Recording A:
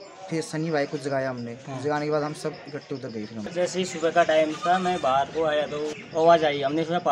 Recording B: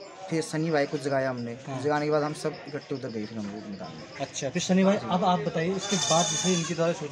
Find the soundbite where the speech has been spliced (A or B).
A